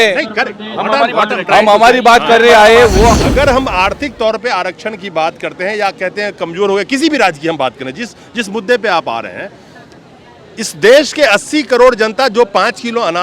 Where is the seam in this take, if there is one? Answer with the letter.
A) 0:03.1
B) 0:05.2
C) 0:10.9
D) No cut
A